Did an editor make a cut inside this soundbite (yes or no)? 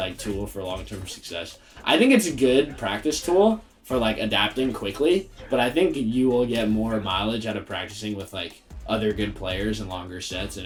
no